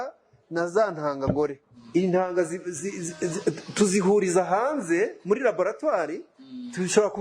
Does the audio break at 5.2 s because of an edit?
no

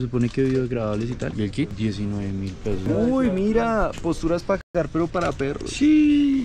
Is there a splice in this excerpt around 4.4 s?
no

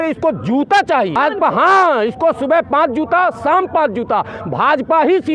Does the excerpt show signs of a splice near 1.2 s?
yes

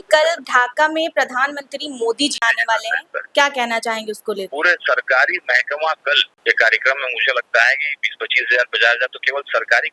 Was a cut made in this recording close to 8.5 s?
no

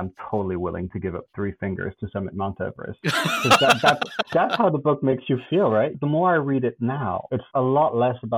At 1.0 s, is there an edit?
no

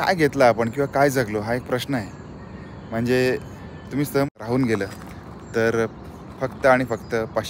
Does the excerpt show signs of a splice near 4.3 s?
yes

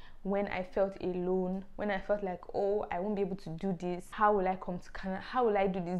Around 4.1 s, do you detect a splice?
yes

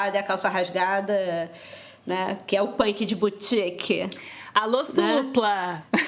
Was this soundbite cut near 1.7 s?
no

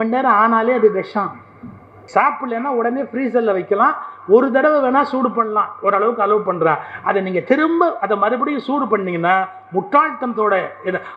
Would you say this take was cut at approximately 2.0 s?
yes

